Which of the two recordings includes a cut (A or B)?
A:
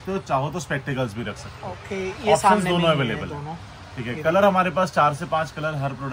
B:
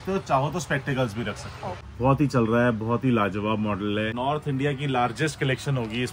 B